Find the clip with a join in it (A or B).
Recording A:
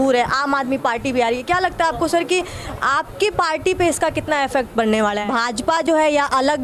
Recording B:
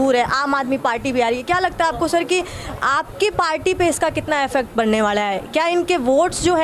A